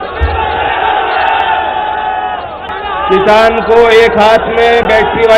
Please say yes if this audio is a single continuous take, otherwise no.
no